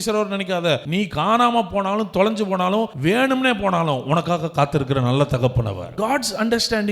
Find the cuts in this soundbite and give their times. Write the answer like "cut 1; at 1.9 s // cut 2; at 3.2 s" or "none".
cut 1; at 1.1 s // cut 2; at 2.9 s // cut 3; at 5.9 s